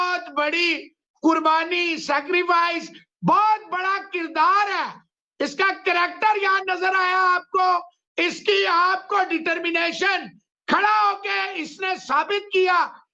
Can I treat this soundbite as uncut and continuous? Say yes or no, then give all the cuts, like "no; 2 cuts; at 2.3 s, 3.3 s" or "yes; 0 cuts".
yes; 0 cuts